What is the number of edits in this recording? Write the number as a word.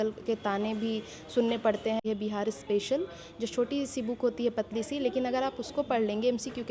one